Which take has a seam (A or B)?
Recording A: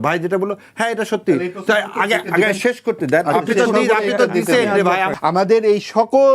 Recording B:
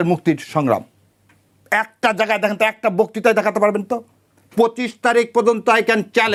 A